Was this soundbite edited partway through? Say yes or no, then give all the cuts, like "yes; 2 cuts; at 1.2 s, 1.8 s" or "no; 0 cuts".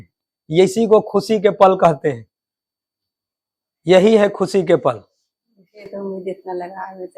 no; 0 cuts